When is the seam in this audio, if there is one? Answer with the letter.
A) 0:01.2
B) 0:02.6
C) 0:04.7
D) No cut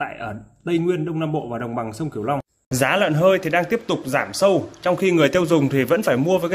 B